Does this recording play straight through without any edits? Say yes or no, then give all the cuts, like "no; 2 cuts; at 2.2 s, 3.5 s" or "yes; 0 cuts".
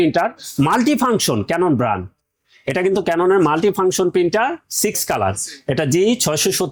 yes; 0 cuts